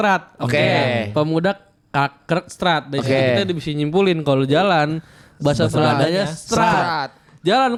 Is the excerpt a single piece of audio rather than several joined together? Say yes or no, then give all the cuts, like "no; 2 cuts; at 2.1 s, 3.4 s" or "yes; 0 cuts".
yes; 0 cuts